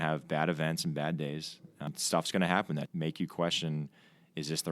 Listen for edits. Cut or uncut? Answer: cut